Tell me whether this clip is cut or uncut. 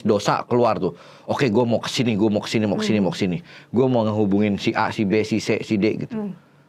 uncut